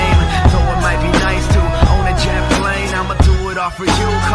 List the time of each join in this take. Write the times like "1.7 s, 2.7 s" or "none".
none